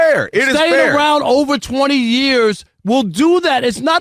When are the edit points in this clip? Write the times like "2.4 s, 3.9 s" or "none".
2.7 s